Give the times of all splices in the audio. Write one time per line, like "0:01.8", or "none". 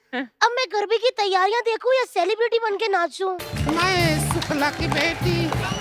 0:03.4